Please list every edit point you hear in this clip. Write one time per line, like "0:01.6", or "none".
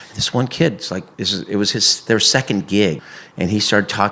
0:01.1
0:03.0

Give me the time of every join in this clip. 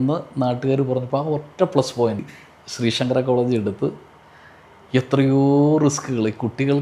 0:02.3

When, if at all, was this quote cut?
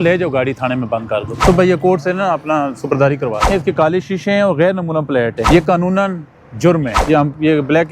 0:01.3
0:03.5
0:05.4
0:06.9

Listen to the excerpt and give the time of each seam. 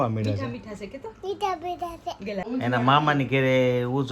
0:02.4

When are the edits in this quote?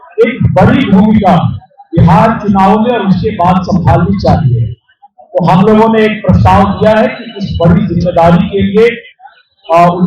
none

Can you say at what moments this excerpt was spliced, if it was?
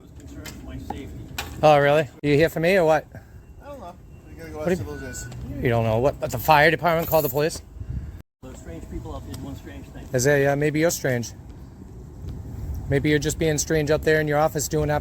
0:02.1
0:08.3

